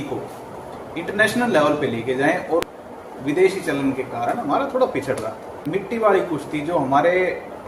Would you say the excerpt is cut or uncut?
cut